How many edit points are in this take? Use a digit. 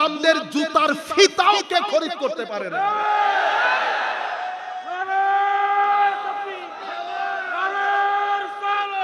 0